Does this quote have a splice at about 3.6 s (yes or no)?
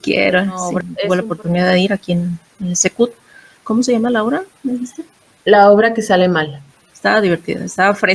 yes